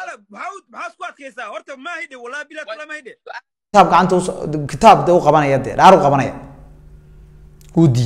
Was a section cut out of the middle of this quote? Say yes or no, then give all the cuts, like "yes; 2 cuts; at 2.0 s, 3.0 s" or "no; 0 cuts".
yes; 1 cut; at 3.5 s